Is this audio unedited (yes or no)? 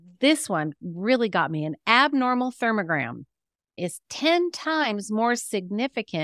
no